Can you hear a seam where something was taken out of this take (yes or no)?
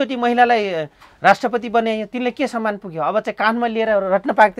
no